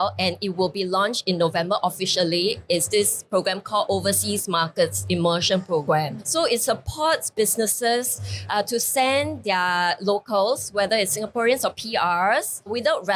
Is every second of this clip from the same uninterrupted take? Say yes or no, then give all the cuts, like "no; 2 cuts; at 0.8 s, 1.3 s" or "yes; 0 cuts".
yes; 0 cuts